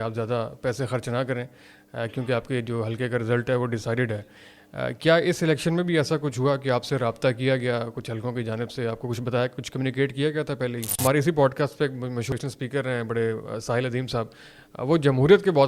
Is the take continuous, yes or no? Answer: no